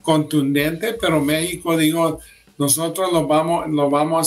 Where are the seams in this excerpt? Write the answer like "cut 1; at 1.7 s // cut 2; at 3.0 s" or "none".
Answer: none